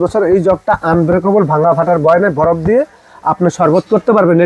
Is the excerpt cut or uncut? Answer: uncut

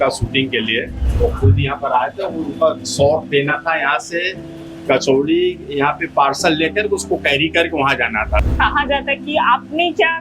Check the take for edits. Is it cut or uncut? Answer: cut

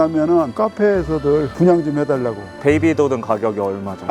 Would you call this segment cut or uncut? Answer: uncut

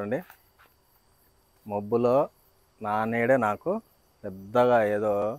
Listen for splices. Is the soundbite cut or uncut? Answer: uncut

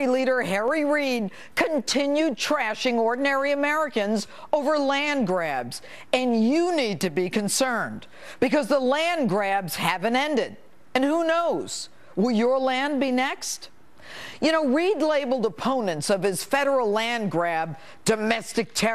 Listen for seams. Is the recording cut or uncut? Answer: cut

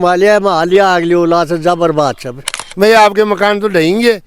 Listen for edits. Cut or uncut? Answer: cut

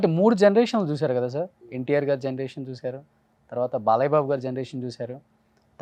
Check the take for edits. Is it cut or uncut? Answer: uncut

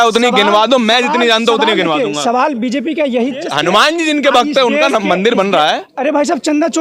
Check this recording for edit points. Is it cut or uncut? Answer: cut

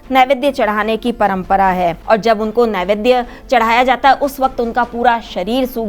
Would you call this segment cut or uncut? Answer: cut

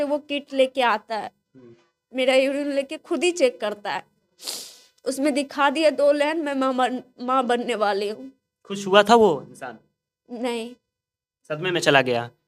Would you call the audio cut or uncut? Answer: uncut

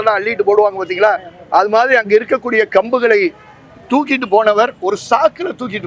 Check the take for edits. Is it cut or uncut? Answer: uncut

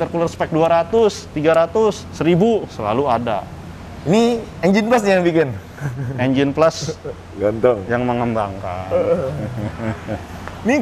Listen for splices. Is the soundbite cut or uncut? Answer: uncut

